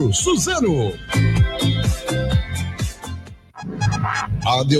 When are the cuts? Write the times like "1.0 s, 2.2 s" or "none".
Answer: 3.4 s